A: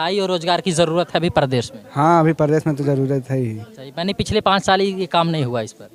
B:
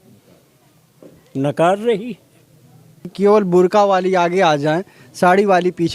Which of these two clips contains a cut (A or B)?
B